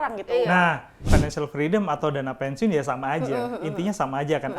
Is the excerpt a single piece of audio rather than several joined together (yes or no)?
no